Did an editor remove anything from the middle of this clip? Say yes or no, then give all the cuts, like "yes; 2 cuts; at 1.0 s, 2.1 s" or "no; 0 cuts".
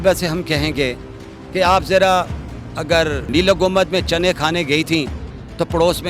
yes; 1 cut; at 3.3 s